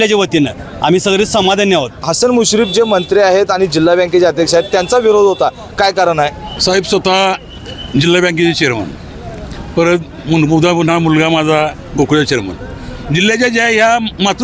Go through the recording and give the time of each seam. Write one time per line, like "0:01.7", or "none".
0:02.1
0:06.5